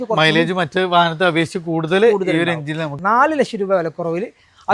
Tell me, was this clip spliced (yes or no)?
yes